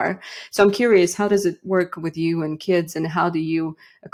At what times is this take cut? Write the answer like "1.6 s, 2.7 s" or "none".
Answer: none